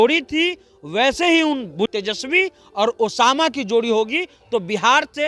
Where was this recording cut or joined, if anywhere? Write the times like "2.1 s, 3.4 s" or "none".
1.9 s